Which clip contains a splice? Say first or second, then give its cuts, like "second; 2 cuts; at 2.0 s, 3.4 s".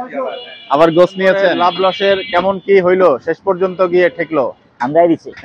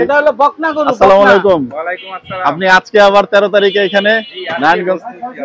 first; 1 cut; at 1.6 s